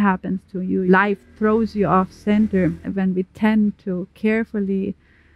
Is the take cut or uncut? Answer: cut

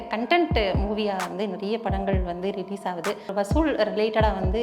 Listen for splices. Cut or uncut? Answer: cut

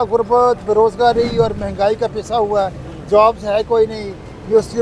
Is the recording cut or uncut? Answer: uncut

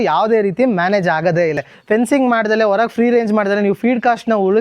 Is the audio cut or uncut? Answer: cut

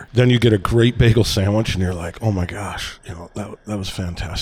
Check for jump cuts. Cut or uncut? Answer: uncut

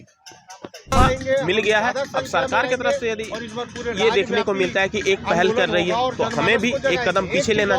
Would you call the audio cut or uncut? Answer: cut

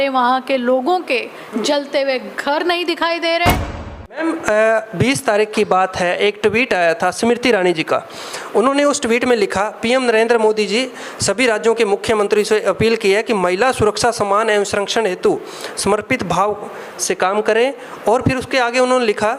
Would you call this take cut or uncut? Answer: cut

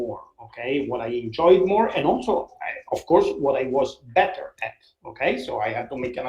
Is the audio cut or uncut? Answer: uncut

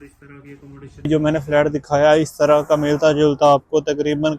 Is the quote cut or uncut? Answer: cut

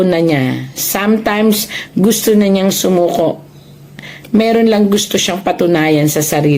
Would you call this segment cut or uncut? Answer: uncut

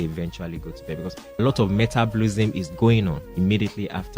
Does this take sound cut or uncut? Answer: cut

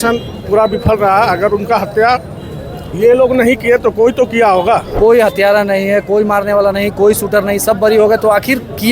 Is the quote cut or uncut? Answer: cut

